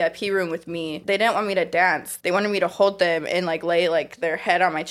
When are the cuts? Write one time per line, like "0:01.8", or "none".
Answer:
0:01.0
0:02.1